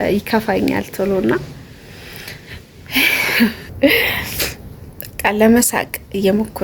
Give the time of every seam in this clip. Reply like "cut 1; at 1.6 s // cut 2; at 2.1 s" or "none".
cut 1; at 3.7 s

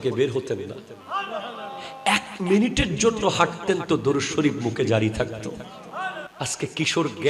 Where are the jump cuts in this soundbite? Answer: cut 1; at 6.2 s

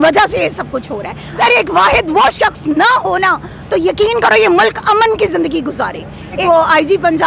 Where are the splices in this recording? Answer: cut 1; at 1.4 s // cut 2; at 6.4 s

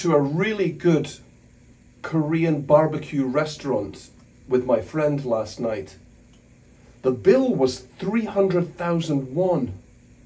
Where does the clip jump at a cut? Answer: none

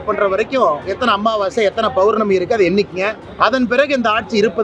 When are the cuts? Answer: cut 1; at 3.2 s

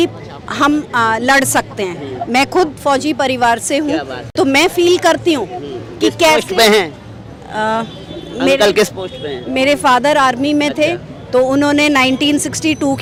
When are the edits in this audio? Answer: none

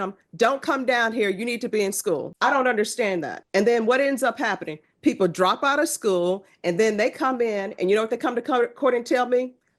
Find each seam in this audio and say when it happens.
cut 1; at 2.3 s // cut 2; at 3.4 s

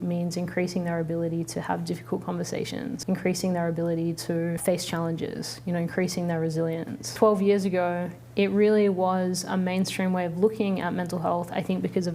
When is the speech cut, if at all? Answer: cut 1; at 3.0 s // cut 2; at 4.6 s // cut 3; at 7.1 s

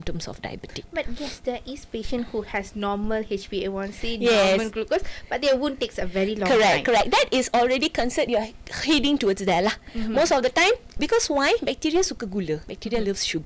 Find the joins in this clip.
none

